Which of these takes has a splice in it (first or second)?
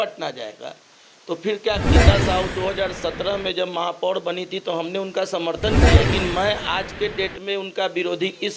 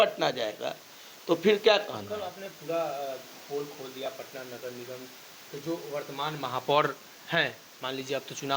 first